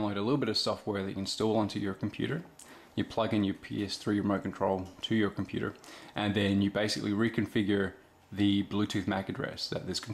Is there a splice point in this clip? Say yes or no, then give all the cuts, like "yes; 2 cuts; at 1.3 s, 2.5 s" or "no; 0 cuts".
yes; 1 cut; at 5.6 s